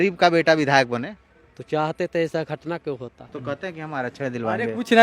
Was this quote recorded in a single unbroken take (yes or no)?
no